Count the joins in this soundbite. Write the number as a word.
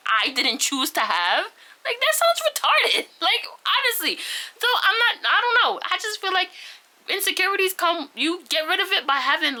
zero